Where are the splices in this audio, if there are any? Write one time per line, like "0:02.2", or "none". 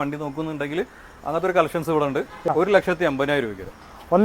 0:02.5